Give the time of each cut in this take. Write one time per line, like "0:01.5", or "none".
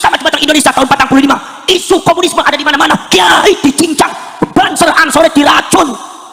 none